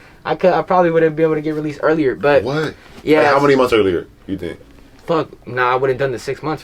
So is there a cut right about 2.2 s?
no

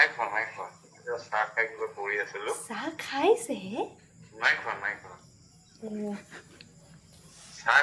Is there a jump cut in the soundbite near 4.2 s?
no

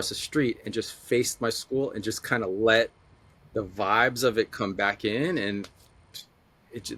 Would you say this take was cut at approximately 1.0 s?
no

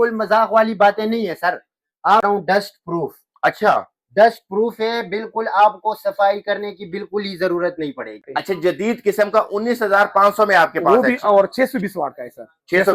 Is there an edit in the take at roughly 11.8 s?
no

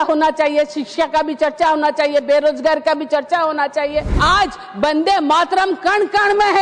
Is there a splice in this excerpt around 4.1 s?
yes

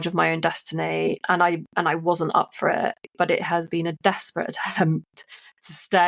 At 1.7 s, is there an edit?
no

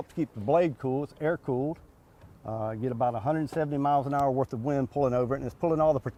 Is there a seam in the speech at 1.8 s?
no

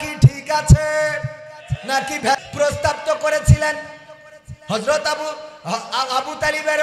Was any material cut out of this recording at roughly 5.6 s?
no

